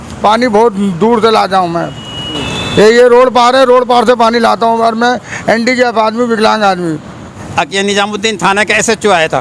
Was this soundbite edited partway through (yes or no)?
yes